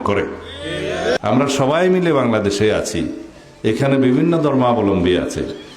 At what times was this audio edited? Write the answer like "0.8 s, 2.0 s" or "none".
1.2 s